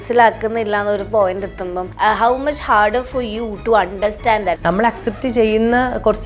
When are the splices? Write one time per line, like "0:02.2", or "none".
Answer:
0:01.9
0:04.6